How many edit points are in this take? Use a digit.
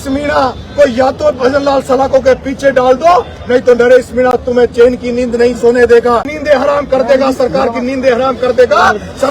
1